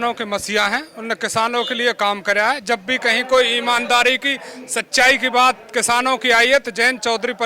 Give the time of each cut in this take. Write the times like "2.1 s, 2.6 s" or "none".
none